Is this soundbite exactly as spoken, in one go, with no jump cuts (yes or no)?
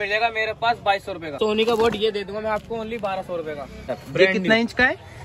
no